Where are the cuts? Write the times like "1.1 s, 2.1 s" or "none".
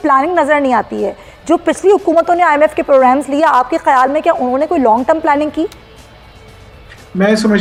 none